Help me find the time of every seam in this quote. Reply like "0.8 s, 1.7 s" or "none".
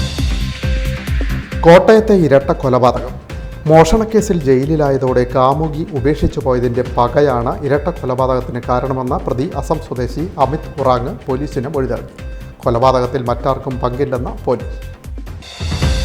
1.3 s